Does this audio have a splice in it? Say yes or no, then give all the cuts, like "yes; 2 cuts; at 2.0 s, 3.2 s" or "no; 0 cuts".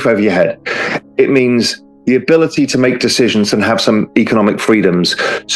no; 0 cuts